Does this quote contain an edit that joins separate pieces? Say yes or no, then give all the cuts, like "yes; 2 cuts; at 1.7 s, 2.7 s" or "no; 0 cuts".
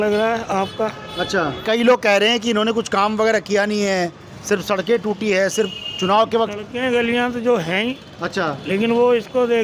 yes; 1 cut; at 1.6 s